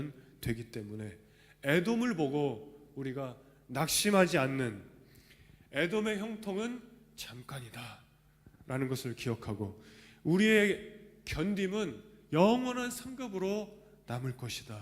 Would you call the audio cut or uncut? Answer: uncut